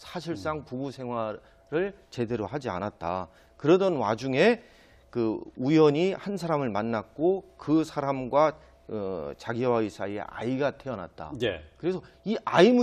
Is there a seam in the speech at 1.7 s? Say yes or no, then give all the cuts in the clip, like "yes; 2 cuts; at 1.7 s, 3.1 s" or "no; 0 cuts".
yes; 1 cut; at 1.7 s